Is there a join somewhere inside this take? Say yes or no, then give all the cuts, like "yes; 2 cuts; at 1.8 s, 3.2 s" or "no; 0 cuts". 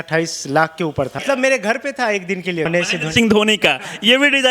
yes; 2 cuts; at 1.2 s, 2.7 s